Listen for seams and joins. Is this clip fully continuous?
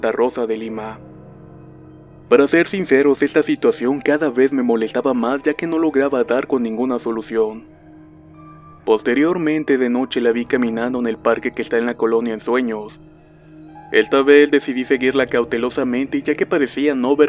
yes; 0 cuts

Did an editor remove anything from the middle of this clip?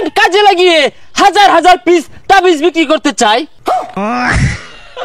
yes; 1 cut; at 3.7 s

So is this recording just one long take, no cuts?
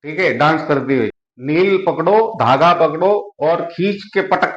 no; 1 cut; at 1.3 s

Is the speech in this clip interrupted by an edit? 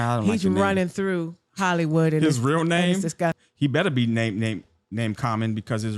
yes; 1 cut; at 3.4 s

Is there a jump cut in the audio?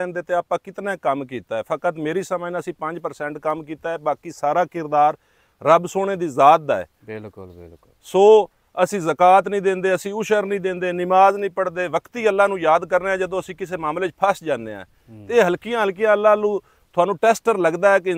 no; 0 cuts

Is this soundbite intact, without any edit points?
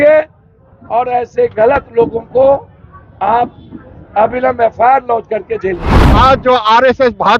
no; 1 cut; at 6.0 s

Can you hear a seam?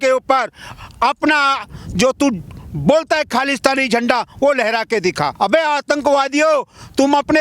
yes; 1 cut; at 5.3 s

